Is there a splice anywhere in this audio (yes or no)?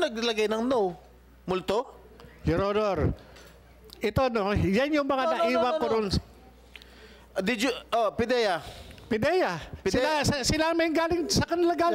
no